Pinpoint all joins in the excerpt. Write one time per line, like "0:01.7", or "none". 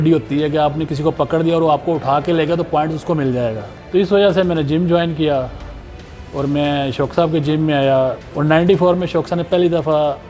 0:03.7
0:08.3